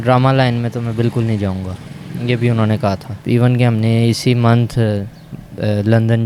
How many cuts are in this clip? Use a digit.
1